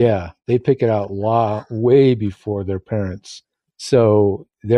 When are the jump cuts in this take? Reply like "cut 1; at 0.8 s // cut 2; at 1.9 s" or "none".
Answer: none